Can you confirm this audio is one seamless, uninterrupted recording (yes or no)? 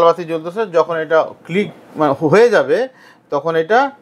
yes